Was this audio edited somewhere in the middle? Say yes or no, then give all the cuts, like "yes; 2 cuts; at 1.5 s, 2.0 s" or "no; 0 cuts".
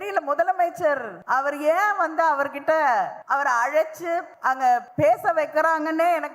yes; 3 cuts; at 1.1 s, 3.2 s, 4.6 s